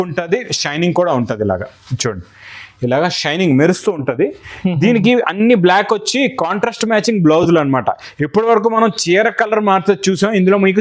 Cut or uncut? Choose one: uncut